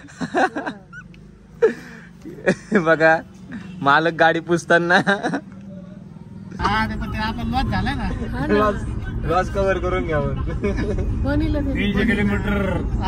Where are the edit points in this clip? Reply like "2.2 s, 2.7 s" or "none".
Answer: 6.5 s